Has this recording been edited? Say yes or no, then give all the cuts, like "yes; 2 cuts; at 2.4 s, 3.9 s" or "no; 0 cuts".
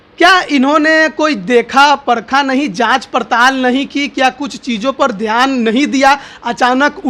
no; 0 cuts